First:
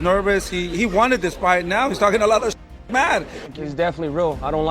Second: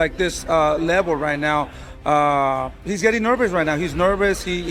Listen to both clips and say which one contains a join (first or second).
first